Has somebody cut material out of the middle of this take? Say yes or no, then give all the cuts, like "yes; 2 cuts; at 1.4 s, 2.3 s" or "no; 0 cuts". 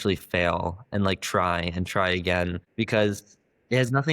yes; 1 cut; at 2.6 s